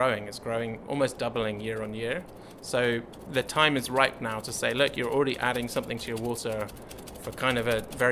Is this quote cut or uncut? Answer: uncut